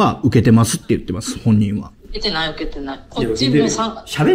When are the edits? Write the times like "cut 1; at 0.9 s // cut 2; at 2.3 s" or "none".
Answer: none